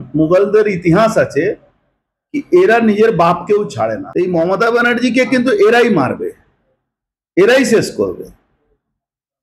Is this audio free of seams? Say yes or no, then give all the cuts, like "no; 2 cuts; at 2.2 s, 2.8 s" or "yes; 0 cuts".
no; 1 cut; at 4.0 s